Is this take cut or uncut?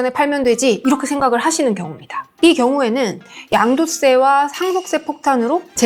uncut